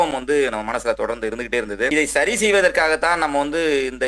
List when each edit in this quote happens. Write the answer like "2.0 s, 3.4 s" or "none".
1.9 s